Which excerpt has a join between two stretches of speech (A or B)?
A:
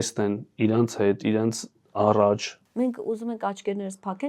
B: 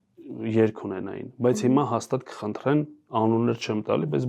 A